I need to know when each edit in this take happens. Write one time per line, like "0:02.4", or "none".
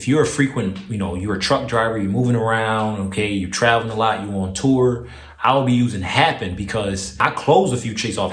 0:07.2